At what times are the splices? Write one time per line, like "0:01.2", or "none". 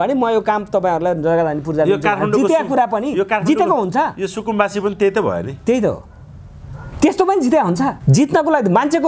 0:08.0